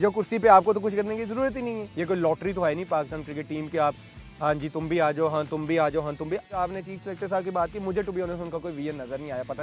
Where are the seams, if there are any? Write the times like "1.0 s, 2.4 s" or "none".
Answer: 1.9 s, 6.5 s